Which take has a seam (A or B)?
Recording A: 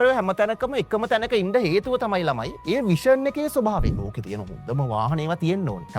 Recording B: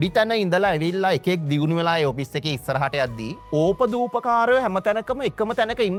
A